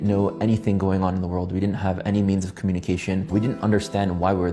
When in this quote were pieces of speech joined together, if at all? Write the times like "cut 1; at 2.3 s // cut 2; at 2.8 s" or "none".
cut 1; at 3.3 s